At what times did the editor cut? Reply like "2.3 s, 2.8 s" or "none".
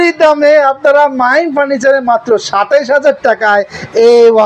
none